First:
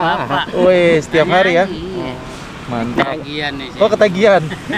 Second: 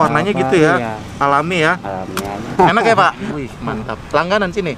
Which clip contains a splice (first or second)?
second